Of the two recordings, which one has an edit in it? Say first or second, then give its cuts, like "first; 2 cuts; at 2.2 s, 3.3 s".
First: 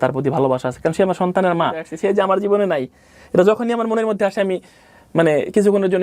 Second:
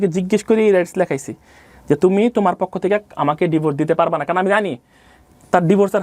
first; 1 cut; at 1.9 s